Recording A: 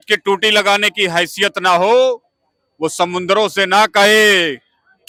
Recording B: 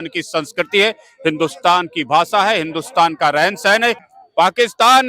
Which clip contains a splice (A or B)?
B